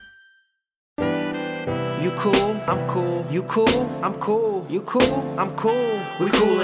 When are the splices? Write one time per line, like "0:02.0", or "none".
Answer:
0:01.0

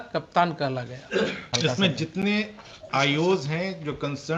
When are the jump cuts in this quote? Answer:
0:01.5

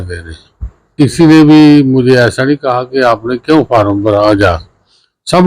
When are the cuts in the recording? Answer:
0:00.9

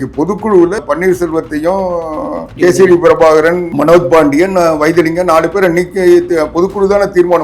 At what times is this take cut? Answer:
0:00.8
0:02.5
0:03.7

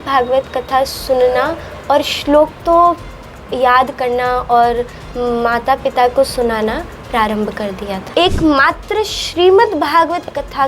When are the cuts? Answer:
0:08.1

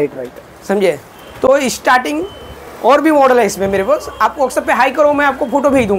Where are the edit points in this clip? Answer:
none

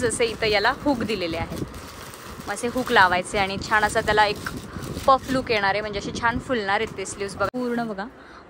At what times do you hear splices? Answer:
0:07.5

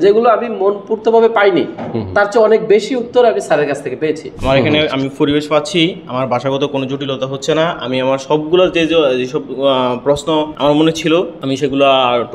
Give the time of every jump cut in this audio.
0:04.3
0:10.5
0:11.4

